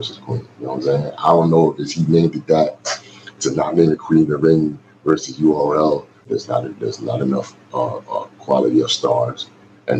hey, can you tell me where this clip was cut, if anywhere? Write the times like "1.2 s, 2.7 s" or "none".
6.2 s